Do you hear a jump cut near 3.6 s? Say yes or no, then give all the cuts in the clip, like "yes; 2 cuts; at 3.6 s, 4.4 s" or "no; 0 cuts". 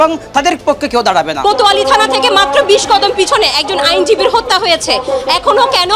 no; 1 cut; at 1.4 s